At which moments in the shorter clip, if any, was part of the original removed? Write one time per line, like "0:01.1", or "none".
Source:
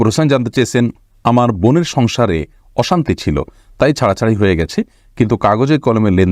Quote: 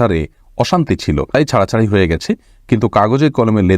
0:01.3